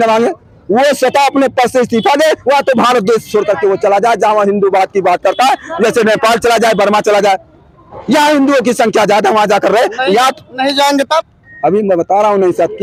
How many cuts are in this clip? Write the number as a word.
zero